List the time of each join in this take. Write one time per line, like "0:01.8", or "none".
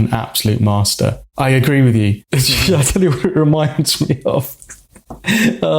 0:01.2
0:02.2